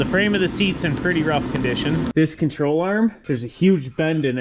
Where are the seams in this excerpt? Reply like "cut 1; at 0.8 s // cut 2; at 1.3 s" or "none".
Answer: cut 1; at 2.1 s // cut 2; at 3.2 s